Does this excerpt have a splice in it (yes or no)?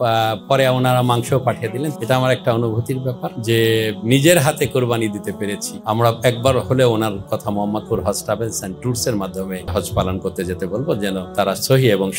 yes